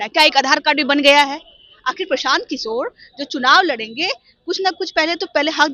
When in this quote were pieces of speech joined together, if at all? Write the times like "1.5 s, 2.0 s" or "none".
none